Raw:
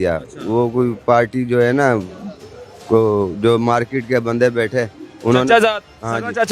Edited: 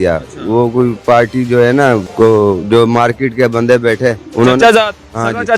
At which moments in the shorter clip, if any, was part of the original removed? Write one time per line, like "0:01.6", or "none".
0:02.1
0:04.2